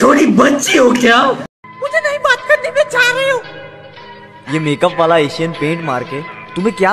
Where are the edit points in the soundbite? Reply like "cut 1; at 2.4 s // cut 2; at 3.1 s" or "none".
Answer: cut 1; at 1.5 s